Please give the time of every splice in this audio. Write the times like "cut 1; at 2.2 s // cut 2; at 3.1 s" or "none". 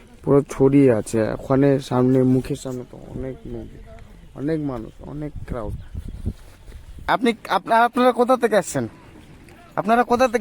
cut 1; at 7.0 s

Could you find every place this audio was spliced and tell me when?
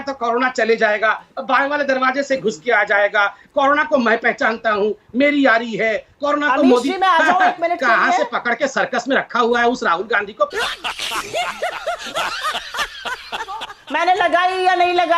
cut 1; at 13.7 s

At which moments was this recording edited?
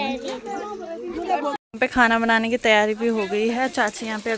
cut 1; at 1.6 s

